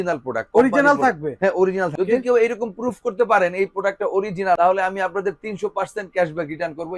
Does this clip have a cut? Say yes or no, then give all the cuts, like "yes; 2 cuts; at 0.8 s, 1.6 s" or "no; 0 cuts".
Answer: no; 0 cuts